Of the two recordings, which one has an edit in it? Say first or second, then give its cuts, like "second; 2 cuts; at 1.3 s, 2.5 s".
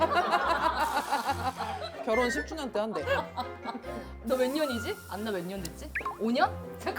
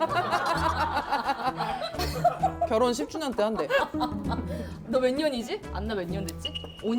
first; 1 cut; at 2.0 s